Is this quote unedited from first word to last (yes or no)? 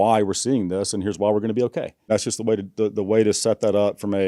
no